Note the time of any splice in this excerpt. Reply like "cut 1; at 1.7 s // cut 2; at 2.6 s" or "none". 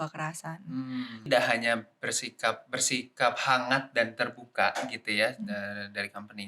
cut 1; at 1.2 s